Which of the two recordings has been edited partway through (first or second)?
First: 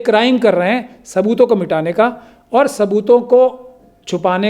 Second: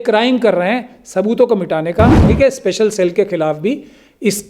second